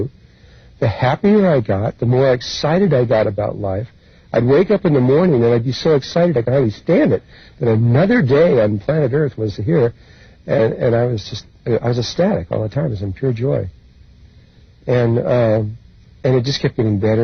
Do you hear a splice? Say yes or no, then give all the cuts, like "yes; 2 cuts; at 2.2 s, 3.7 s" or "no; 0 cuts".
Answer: no; 0 cuts